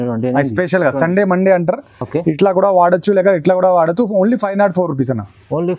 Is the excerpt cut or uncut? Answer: uncut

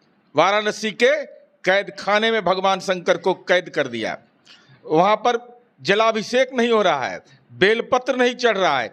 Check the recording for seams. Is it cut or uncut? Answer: uncut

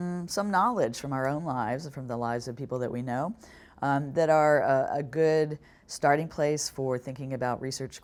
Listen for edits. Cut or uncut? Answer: uncut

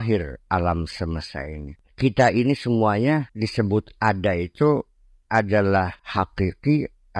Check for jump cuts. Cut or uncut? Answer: cut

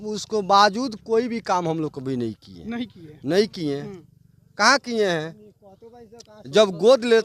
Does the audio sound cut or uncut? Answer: uncut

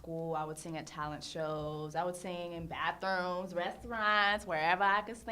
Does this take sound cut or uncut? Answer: cut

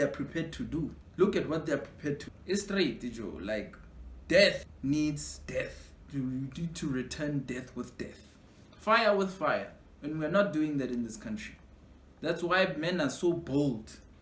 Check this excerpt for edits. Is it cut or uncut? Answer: cut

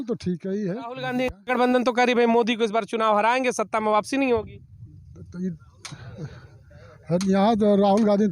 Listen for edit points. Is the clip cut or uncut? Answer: cut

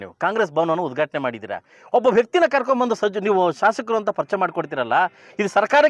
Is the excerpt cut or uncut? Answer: uncut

